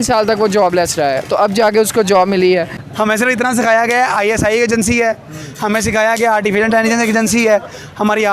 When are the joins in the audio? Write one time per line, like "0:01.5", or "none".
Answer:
0:02.8